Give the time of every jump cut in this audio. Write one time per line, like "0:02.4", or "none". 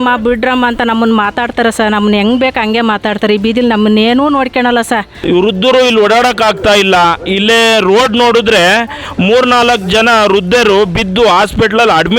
0:05.1